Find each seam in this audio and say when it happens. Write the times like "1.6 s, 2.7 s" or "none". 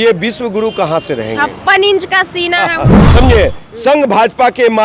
3.0 s